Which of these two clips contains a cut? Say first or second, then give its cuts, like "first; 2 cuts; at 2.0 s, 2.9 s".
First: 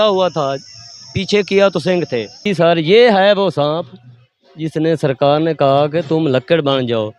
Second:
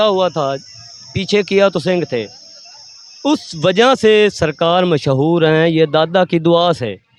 first; 1 cut; at 2.3 s